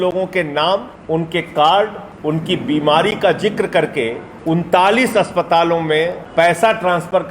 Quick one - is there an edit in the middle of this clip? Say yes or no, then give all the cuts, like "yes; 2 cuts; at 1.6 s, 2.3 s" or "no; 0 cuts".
yes; 4 cuts; at 0.9 s, 2.1 s, 4.3 s, 6.2 s